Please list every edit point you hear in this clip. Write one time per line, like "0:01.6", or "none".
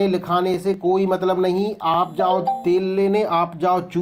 none